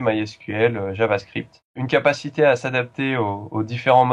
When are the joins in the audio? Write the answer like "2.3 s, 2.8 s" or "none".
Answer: 1.8 s